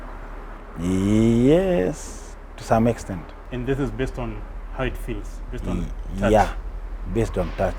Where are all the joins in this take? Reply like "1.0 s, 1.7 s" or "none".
3.4 s